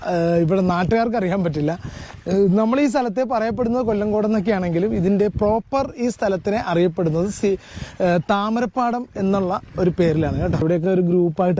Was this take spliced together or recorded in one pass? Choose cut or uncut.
cut